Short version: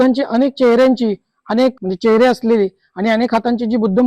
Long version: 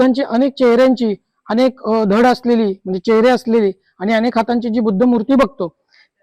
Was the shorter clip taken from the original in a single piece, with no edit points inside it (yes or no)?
no